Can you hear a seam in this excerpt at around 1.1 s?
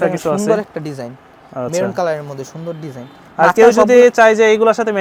no; 0 cuts

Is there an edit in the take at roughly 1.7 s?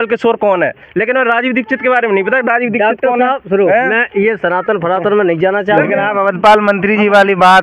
no; 1 cut; at 5.8 s

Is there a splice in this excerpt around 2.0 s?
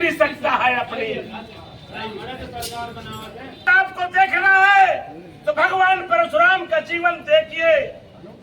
no; 1 cut; at 3.7 s

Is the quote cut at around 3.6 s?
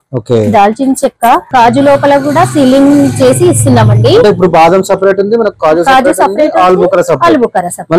no; 1 cut; at 1.5 s

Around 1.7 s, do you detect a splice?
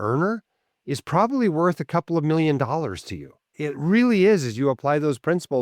no; 1 cut; at 3.5 s

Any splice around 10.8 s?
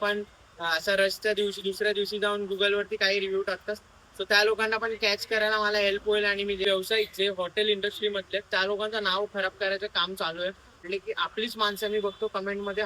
yes; 2 cuts; at 6.6 s, 10.8 s

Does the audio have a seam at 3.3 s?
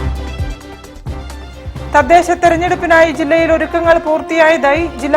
no; 1 cut; at 1.4 s

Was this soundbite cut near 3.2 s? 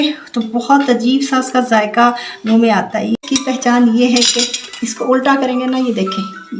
yes; 1 cut; at 3.2 s

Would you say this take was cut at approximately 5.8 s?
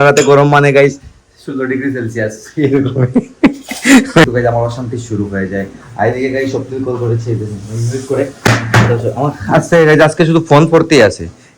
no; 1 cut; at 4.2 s

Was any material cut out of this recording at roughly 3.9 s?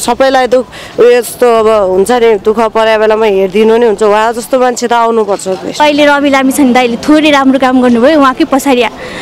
no; 1 cut; at 5.8 s

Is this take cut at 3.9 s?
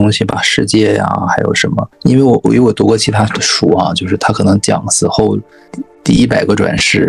no; 2 cuts; at 1.9 s, 5.8 s

